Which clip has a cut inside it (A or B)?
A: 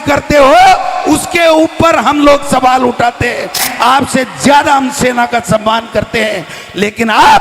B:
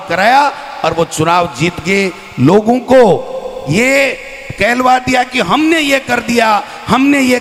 A